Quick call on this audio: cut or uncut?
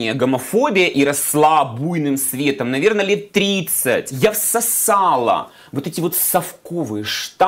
cut